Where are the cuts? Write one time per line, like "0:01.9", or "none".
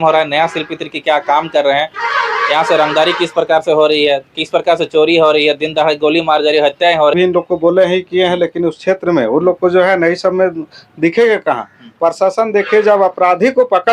0:07.1